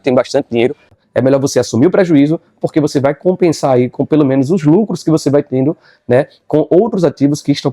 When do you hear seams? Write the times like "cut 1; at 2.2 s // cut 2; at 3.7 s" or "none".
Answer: cut 1; at 1.0 s